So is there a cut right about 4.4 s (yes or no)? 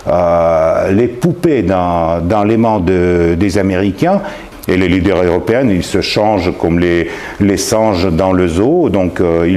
yes